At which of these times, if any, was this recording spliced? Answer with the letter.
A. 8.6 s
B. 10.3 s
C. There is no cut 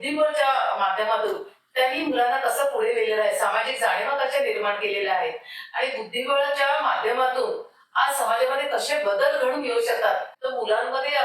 B